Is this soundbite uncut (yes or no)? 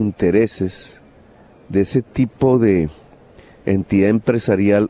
yes